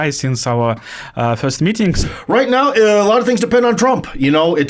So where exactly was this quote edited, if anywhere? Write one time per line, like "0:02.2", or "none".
0:02.0